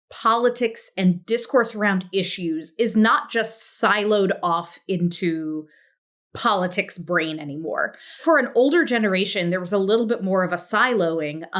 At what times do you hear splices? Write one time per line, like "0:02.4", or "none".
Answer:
0:08.2